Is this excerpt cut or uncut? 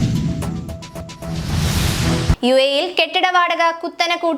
cut